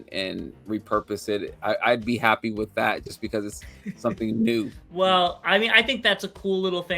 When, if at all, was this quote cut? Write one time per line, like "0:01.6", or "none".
0:04.8